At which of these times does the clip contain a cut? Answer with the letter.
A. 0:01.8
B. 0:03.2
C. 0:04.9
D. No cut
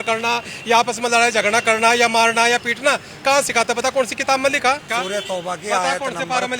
C